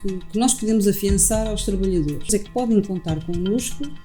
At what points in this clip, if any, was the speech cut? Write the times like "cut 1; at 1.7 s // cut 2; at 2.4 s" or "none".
cut 1; at 2.3 s